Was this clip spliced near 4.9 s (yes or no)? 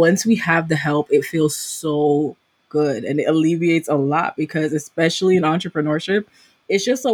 no